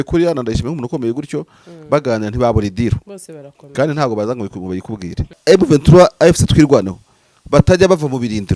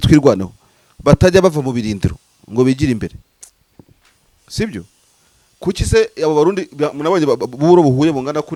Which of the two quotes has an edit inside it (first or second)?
first